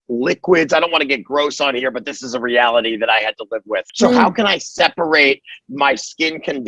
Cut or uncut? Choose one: cut